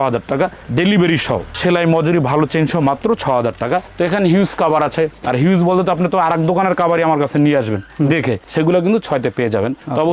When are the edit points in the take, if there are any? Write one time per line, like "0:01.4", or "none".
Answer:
none